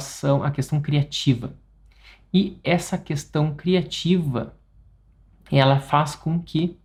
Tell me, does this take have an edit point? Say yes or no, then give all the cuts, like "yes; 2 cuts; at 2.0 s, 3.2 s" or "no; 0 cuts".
no; 0 cuts